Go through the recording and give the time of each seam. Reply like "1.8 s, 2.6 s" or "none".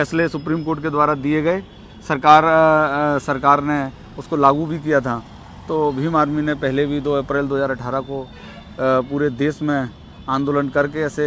none